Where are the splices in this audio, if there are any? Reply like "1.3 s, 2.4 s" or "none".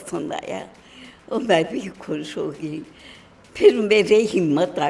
none